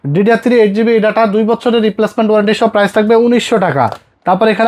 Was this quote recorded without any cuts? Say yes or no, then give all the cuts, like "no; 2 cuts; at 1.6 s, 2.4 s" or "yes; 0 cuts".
yes; 0 cuts